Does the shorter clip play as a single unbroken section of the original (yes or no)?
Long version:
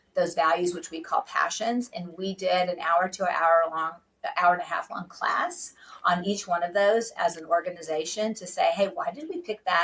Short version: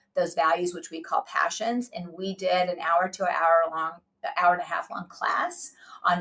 yes